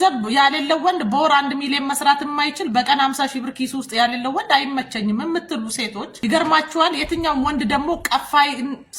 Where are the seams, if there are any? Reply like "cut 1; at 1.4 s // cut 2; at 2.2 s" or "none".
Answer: cut 1; at 6.0 s